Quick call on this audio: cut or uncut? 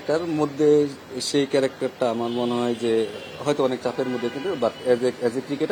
uncut